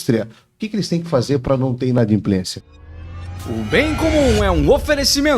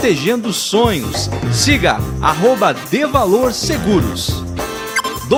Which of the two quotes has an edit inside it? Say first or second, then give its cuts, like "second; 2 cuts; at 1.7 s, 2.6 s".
first; 1 cut; at 2.6 s